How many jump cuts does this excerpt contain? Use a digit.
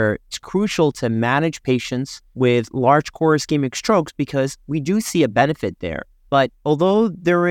0